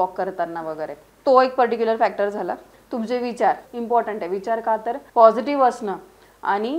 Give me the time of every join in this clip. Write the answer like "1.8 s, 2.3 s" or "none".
1.0 s, 2.7 s, 3.7 s, 5.0 s